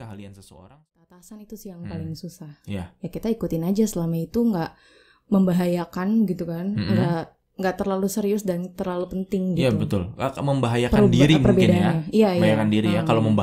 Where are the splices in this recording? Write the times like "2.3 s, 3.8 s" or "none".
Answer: 1.1 s